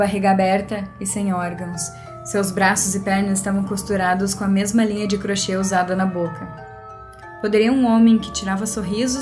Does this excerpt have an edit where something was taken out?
yes; 1 cut; at 6.8 s

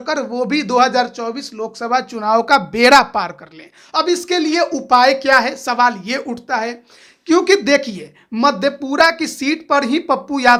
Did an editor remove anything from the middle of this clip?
no; 0 cuts

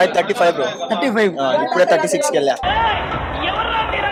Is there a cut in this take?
no; 0 cuts

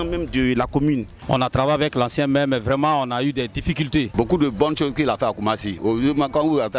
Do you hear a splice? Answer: yes; 2 cuts; at 1.1 s, 4.1 s

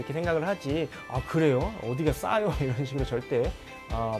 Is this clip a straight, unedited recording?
yes; 0 cuts

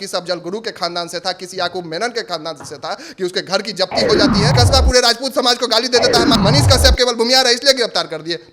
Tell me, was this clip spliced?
yes; 2 cuts; at 4.5 s, 6.3 s

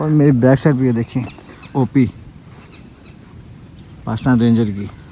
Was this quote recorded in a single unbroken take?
yes; 0 cuts

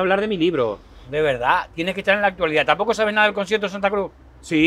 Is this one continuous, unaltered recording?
yes; 0 cuts

